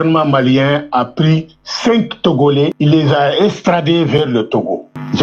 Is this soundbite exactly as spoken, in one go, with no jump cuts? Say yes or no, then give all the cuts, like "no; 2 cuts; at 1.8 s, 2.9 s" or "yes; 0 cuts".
no; 1 cut; at 2.7 s